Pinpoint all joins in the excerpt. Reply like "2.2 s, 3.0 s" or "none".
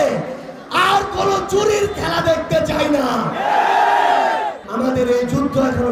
4.6 s